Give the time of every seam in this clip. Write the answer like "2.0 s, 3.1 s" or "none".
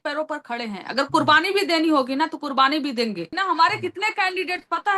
3.3 s

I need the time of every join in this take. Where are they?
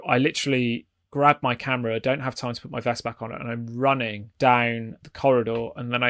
4.2 s, 5.0 s

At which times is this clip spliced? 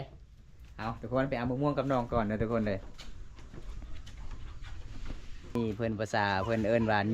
5.5 s

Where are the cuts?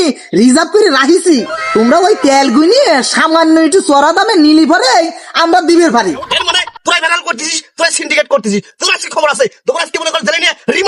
6.3 s

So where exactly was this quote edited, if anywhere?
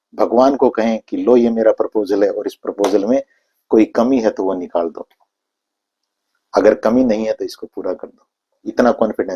none

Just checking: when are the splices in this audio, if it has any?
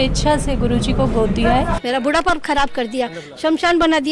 1.8 s

